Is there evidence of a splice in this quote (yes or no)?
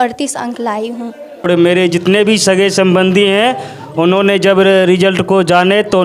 yes